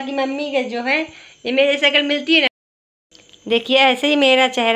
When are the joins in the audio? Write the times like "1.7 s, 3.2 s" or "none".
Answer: 2.5 s